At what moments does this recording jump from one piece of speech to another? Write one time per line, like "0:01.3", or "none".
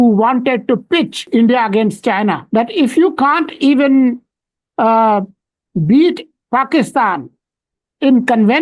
0:01.2
0:02.4